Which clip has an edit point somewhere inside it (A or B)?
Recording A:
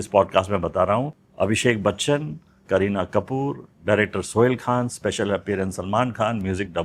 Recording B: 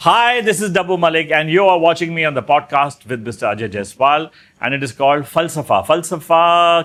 A